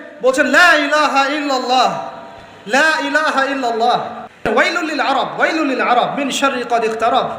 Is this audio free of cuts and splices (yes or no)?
no